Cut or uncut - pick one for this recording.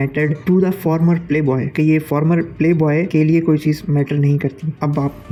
uncut